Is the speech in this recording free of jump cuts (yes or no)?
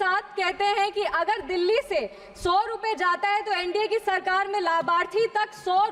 yes